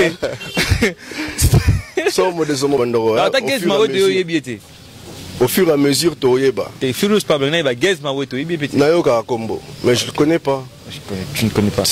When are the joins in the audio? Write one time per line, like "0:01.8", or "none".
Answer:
0:02.8